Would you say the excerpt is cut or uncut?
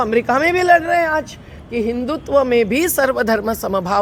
uncut